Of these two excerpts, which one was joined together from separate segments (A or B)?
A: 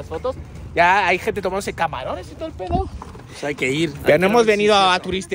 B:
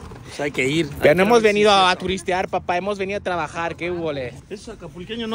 B